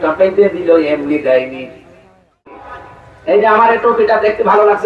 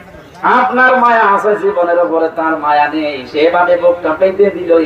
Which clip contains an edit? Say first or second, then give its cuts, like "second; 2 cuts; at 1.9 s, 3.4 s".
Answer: first; 1 cut; at 2.7 s